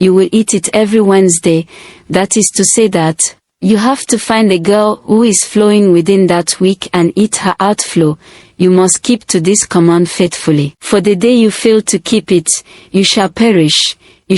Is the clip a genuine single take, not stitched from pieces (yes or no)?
no